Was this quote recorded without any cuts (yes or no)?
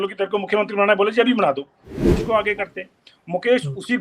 no